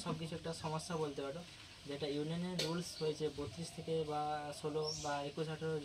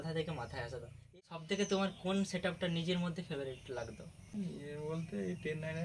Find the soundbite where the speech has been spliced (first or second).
second